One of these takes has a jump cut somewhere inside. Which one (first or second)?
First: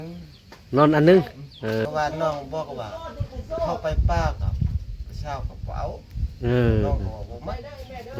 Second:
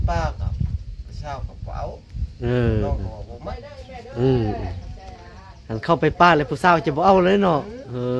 first